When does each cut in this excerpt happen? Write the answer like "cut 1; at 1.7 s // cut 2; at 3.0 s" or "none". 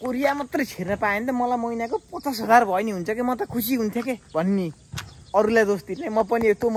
none